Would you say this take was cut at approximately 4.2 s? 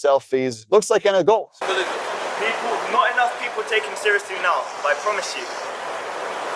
no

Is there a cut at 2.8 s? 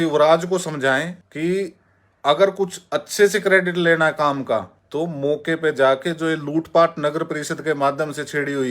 no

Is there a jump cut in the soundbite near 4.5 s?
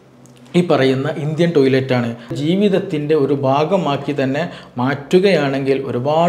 no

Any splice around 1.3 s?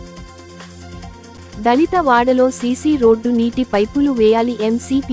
no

